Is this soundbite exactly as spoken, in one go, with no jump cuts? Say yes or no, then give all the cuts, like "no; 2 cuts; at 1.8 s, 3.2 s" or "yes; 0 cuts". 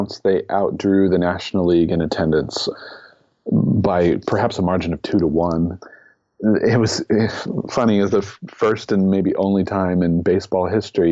no; 2 cuts; at 2.7 s, 5.9 s